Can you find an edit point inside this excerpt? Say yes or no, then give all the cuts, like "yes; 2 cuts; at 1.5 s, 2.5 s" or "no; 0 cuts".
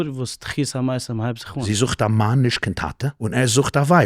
yes; 2 cuts; at 1.6 s, 3.1 s